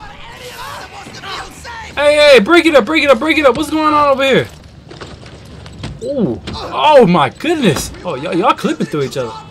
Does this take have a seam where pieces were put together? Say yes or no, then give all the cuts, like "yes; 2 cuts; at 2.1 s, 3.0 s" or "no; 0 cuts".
yes; 1 cut; at 4.7 s